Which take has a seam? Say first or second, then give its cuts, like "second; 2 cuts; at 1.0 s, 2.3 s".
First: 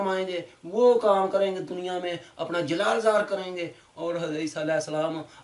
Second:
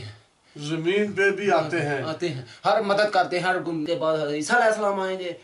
second; 1 cut; at 3.8 s